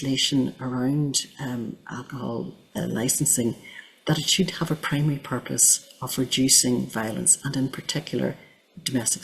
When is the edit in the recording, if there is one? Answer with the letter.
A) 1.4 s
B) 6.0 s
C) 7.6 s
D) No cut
D